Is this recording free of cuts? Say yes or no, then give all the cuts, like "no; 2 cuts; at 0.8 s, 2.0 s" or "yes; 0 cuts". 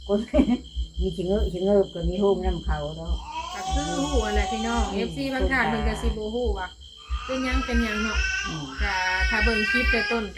yes; 0 cuts